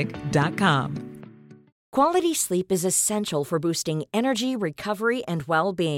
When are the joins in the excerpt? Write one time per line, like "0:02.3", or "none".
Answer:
0:01.7